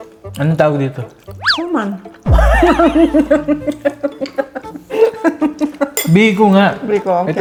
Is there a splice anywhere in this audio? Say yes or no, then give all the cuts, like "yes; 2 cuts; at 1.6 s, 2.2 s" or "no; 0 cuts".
no; 0 cuts